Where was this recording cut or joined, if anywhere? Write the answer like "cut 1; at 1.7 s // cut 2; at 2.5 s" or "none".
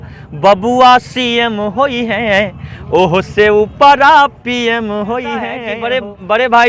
cut 1; at 5.7 s